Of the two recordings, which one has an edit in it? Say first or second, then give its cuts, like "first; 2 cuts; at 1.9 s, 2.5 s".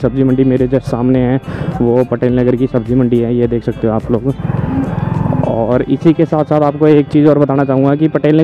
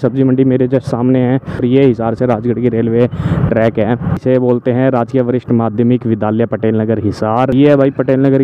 second; 3 cuts; at 1.6 s, 4.2 s, 7.5 s